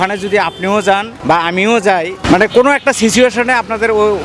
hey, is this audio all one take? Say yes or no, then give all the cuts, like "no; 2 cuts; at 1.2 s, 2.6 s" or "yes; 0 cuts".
no; 2 cuts; at 1.1 s, 2.2 s